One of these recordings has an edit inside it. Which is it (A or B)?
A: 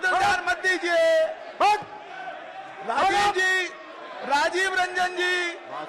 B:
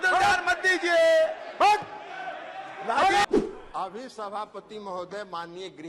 B